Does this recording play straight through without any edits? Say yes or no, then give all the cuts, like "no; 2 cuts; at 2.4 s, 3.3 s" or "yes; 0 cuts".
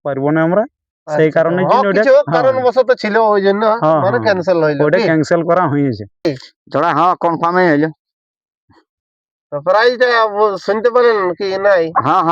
no; 1 cut; at 6.3 s